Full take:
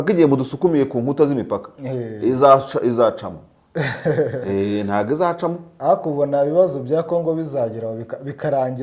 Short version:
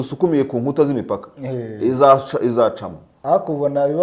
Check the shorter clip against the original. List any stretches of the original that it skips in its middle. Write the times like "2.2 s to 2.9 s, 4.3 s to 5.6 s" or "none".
3.5 s to 5.7 s